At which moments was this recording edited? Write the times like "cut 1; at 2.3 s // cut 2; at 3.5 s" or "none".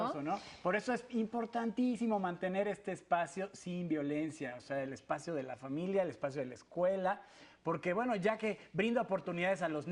cut 1; at 4.2 s